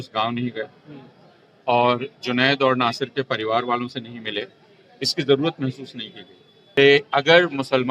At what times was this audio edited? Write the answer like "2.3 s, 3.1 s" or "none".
6.8 s